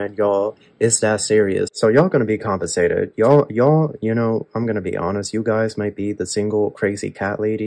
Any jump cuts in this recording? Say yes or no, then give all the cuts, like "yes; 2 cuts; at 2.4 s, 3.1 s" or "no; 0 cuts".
yes; 1 cut; at 1.7 s